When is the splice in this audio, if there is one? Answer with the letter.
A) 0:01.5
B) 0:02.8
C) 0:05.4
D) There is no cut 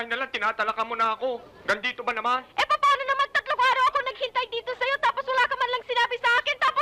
D